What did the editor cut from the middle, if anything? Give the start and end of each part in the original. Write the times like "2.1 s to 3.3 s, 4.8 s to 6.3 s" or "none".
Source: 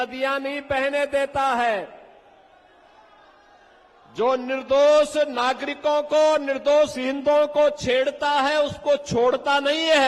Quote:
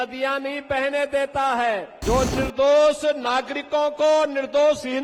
1.9 s to 4.0 s